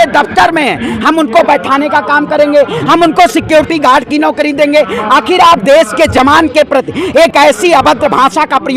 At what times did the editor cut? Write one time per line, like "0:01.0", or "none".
none